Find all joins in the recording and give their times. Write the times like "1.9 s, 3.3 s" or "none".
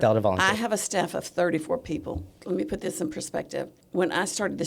2.3 s, 3.8 s